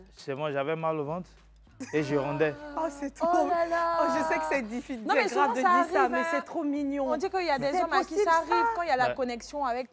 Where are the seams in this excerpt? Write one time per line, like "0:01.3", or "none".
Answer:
none